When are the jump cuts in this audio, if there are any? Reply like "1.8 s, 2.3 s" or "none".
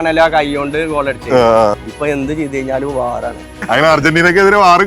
1.7 s, 3.5 s